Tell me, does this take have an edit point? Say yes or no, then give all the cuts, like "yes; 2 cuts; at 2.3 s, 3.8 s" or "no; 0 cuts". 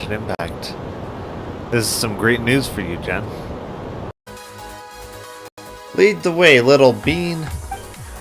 yes; 2 cuts; at 4.2 s, 5.8 s